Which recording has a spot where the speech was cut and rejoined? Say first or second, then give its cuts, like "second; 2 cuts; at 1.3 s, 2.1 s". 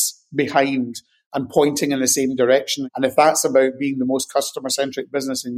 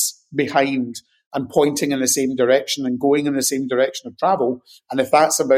first; 1 cut; at 2.8 s